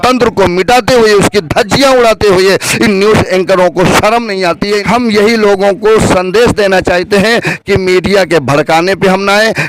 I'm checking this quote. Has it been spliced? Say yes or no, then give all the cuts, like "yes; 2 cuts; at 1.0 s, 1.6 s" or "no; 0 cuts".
yes; 1 cut; at 4.8 s